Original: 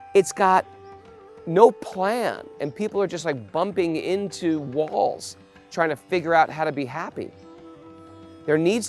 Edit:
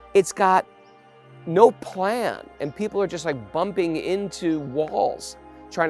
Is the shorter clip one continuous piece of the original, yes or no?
yes